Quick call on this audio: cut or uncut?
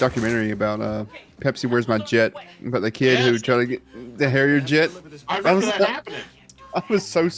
uncut